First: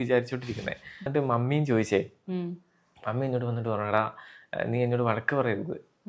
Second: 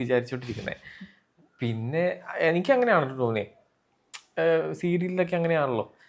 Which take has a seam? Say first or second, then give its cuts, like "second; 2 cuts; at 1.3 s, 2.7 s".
first; 1 cut; at 1.1 s